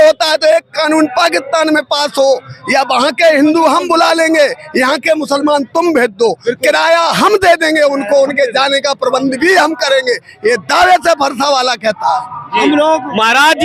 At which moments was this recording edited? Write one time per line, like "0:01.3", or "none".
none